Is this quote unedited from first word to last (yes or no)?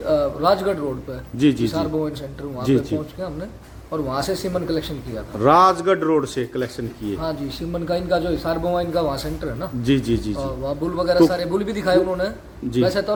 yes